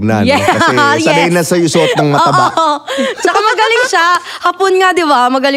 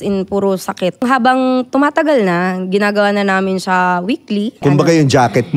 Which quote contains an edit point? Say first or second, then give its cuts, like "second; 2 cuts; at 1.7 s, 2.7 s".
second; 2 cuts; at 1.0 s, 4.6 s